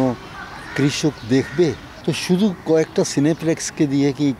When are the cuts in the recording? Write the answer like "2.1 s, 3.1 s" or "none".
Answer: 1.9 s

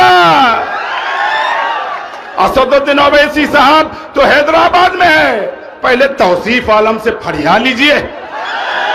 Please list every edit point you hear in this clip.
none

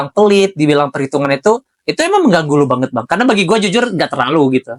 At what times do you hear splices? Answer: none

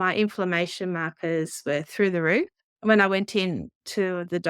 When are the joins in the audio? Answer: 2.6 s

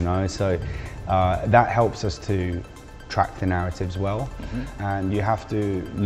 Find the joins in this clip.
4.6 s

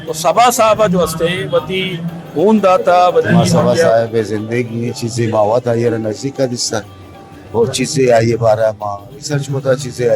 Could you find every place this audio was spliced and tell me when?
3.8 s

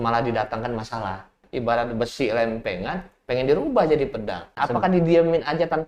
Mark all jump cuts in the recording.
1.4 s, 4.5 s

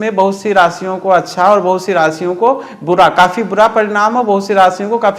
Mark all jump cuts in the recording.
none

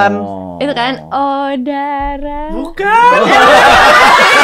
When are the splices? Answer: none

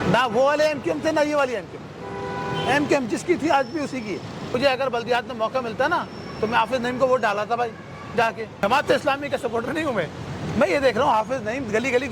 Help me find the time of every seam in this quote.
4.5 s, 8.6 s

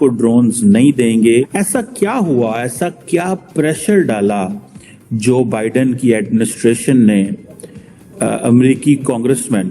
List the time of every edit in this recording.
1.5 s

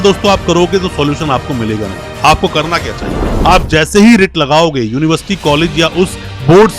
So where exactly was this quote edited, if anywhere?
3.2 s

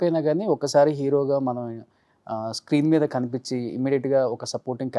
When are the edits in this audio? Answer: none

